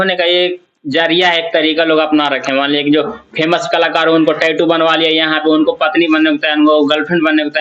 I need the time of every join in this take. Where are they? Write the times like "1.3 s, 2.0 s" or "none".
none